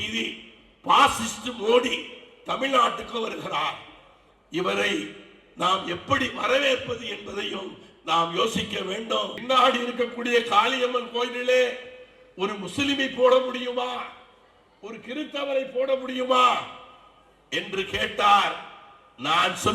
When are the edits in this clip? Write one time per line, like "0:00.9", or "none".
0:09.4